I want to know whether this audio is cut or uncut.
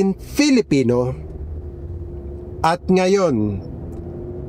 uncut